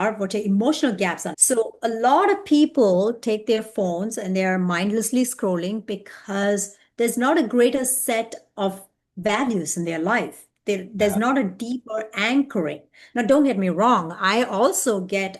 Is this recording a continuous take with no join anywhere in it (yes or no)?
no